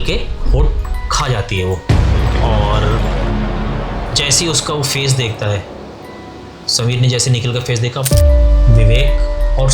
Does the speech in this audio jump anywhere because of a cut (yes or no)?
yes